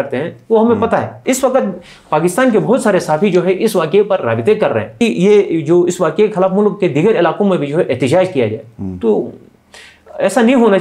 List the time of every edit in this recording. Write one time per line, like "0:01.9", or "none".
0:01.1
0:05.0